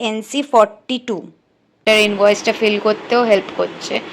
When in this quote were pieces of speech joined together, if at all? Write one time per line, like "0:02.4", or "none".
0:01.8

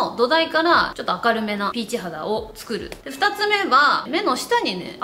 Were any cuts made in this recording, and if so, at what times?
0:01.0
0:02.9
0:04.0

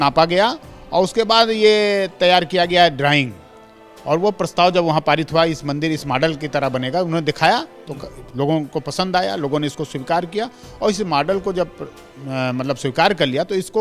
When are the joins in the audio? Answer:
none

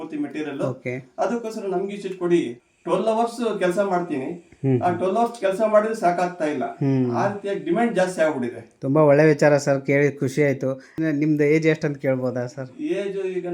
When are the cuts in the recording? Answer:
0:02.6
0:11.0

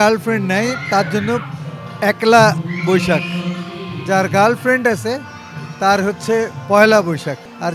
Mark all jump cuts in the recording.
none

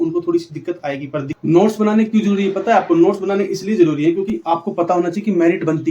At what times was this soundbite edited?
0:01.4
0:04.3

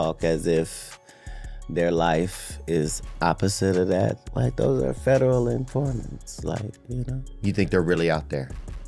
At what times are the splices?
none

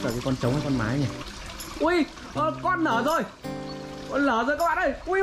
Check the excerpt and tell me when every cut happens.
none

